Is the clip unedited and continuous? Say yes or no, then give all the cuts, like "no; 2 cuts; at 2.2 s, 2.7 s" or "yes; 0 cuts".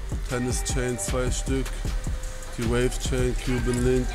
yes; 0 cuts